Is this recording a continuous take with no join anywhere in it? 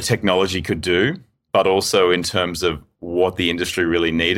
yes; 0 cuts

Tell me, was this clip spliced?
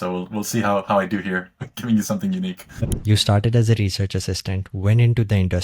yes; 1 cut; at 2.8 s

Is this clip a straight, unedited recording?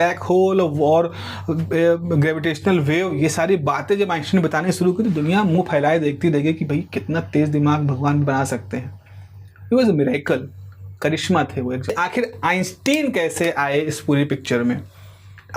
no; 1 cut; at 11.9 s

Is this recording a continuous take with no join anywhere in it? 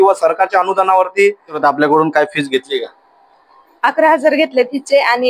no; 1 cut; at 1.6 s

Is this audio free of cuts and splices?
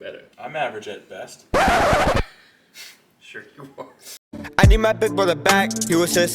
no; 1 cut; at 4.4 s

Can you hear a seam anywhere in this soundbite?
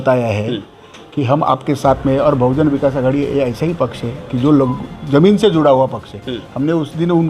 no; 0 cuts

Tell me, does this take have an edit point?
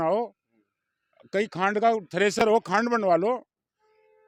no; 0 cuts

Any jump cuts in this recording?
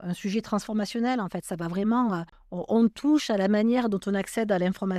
no; 0 cuts

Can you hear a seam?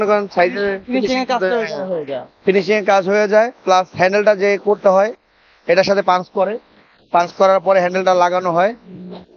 no; 0 cuts

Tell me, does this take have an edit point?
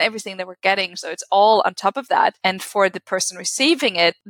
yes; 1 cut; at 2.4 s

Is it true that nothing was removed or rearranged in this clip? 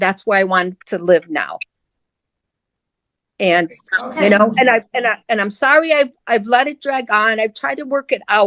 yes; 0 cuts

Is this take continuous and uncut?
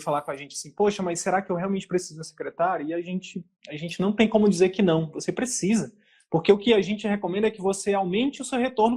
yes; 0 cuts

